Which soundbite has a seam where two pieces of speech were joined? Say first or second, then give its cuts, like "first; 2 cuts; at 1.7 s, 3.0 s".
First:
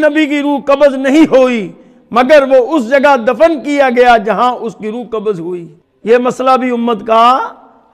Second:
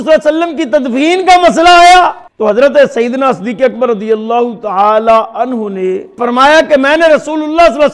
second; 2 cuts; at 2.2 s, 6.2 s